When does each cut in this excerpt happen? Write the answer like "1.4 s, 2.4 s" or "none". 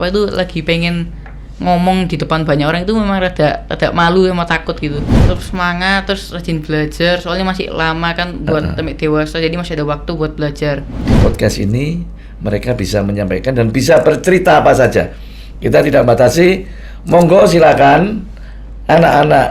5.1 s, 10.9 s